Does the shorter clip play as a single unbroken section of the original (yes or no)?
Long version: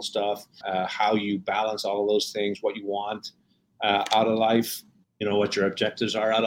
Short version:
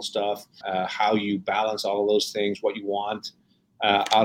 yes